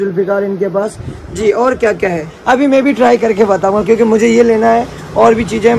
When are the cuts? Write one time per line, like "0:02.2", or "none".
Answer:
0:02.3